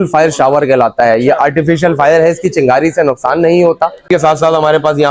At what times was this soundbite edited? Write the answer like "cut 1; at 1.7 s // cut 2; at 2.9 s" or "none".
cut 1; at 4.0 s